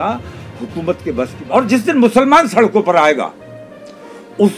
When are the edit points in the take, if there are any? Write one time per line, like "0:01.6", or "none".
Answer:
0:01.4